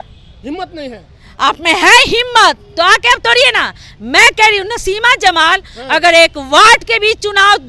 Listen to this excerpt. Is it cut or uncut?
uncut